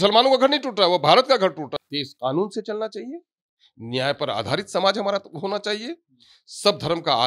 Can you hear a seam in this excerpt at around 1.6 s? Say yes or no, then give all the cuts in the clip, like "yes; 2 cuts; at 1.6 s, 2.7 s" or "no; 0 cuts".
yes; 1 cut; at 1.6 s